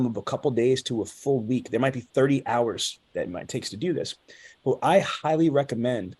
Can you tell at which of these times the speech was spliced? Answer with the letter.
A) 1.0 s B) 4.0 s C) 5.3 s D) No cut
D